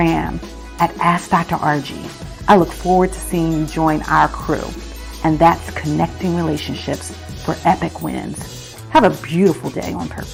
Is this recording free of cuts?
yes; 0 cuts

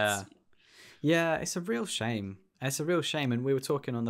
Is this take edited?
no; 0 cuts

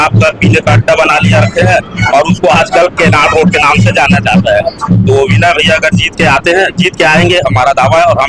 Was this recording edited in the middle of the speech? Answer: no; 0 cuts

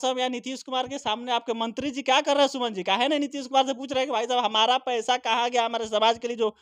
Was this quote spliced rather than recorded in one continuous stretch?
no; 0 cuts

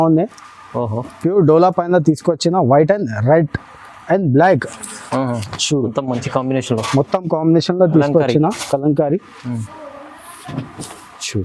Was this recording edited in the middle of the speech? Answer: no; 0 cuts

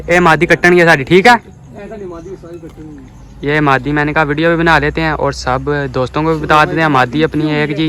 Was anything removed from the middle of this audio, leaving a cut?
no; 0 cuts

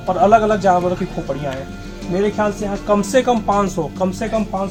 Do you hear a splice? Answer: no; 0 cuts

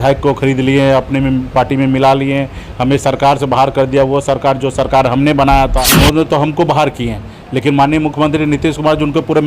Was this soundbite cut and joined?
yes; 1 cut; at 5.9 s

